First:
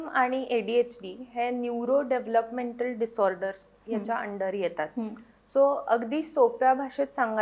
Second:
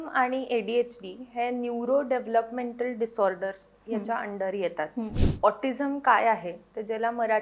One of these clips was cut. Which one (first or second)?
second